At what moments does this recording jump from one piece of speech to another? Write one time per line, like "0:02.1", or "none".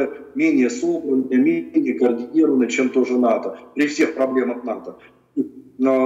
none